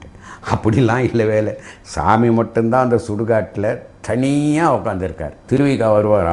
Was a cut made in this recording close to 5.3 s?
yes; 1 cut; at 5.3 s

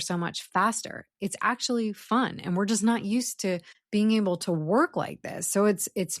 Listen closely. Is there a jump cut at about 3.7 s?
yes; 1 cut; at 3.7 s

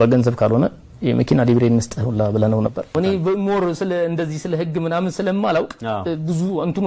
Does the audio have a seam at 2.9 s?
yes; 1 cut; at 2.9 s

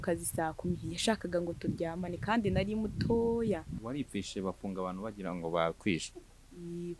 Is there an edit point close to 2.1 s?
no; 1 cut; at 3.7 s

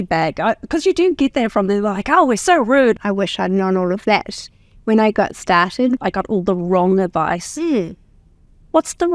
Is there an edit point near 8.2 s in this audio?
no; 2 cuts; at 3.0 s, 6.0 s

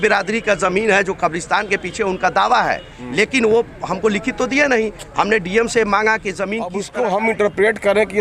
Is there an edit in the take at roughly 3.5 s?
no; 1 cut; at 6.8 s

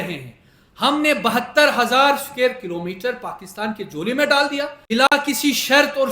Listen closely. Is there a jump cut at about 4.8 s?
yes; 1 cut; at 4.8 s

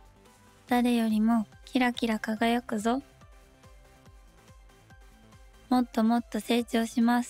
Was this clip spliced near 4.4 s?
no; 3 cuts; at 0.7 s, 3.1 s, 5.7 s

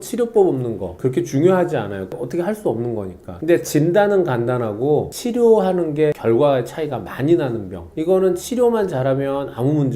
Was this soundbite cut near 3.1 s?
no; 1 cut; at 0.9 s

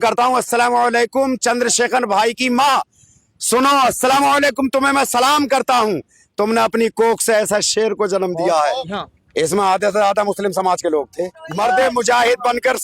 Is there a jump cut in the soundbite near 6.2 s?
no; 2 cuts; at 8.9 s, 11.4 s

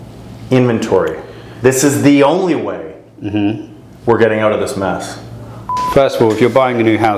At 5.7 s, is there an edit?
yes; 1 cut; at 5.7 s

